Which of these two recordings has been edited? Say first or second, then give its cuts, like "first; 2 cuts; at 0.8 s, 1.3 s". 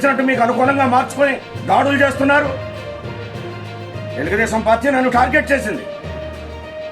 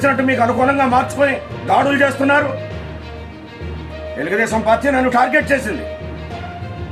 first; 3 cuts; at 2.6 s, 4.2 s, 5.8 s